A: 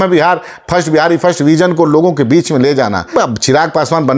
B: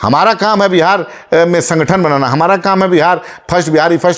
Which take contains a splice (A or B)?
A